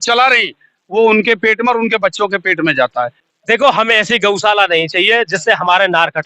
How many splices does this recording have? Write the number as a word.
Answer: one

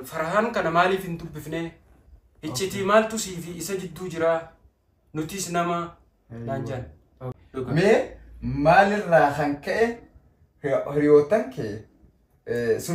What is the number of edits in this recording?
one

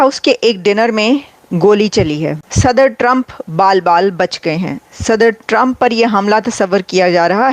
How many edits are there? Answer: one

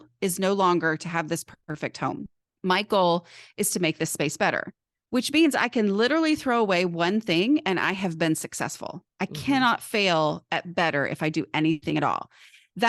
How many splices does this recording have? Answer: three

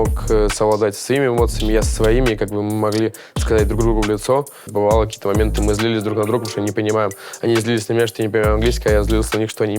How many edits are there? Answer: one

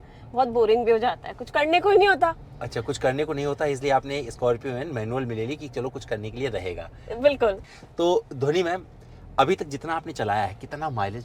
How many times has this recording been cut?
zero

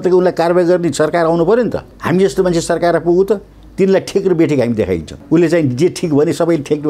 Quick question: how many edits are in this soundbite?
two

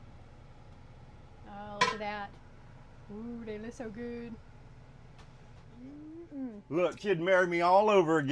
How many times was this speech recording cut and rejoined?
one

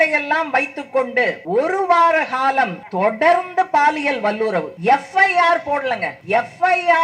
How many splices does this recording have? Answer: four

